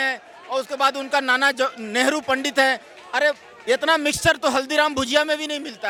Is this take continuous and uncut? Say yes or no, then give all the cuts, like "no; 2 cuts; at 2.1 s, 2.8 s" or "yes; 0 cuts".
yes; 0 cuts